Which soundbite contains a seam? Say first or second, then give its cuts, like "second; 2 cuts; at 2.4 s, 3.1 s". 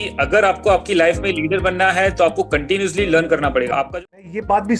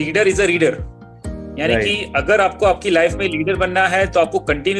first; 1 cut; at 3.8 s